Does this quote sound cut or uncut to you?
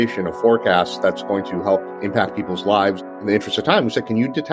cut